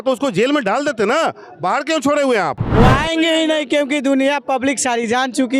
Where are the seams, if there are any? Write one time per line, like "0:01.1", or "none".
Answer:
0:02.6